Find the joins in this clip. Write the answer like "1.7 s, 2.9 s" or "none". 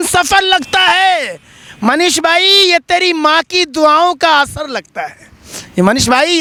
none